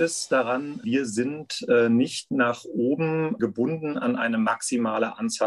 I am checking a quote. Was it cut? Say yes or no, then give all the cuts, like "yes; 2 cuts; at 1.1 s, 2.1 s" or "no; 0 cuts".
yes; 2 cuts; at 0.8 s, 3.4 s